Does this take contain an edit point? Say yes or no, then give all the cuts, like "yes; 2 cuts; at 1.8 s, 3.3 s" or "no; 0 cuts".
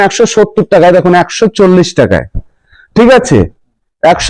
no; 0 cuts